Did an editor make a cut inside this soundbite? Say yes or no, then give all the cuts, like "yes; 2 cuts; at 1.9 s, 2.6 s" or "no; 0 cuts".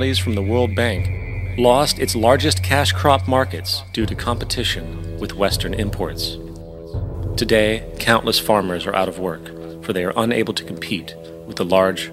no; 0 cuts